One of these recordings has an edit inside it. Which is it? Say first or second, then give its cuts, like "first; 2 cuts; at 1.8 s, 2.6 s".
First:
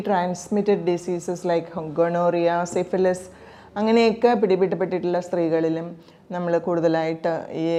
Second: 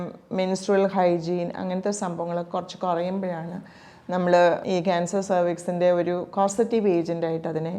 second; 1 cut; at 4.6 s